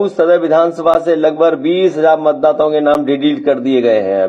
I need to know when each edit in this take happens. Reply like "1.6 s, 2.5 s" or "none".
none